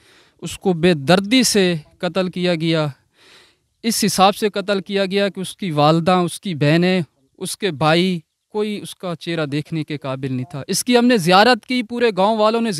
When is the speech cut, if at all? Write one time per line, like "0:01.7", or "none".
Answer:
none